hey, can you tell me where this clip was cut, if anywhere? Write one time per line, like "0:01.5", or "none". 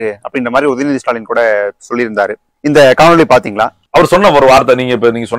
0:03.8